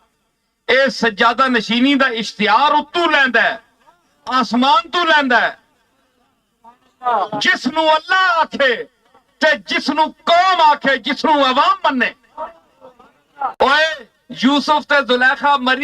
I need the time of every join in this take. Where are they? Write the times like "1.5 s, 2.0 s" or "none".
13.5 s